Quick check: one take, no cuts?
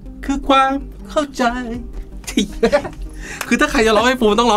yes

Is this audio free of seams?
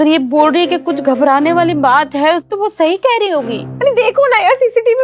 no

